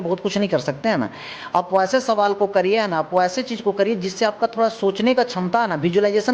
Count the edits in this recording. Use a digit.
1